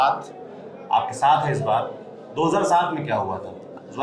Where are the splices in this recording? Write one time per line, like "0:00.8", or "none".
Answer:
none